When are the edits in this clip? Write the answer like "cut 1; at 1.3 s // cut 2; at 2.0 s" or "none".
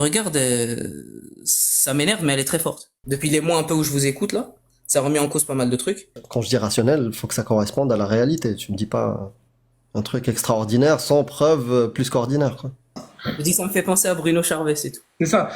cut 1; at 2.9 s // cut 2; at 6.2 s // cut 3; at 13.1 s